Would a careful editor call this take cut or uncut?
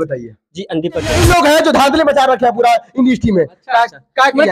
cut